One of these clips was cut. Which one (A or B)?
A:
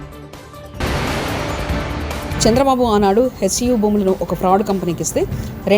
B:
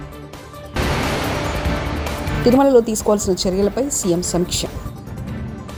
A